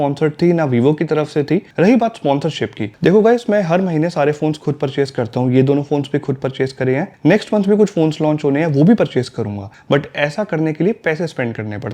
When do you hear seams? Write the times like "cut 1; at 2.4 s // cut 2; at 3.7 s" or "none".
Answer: cut 1; at 1.7 s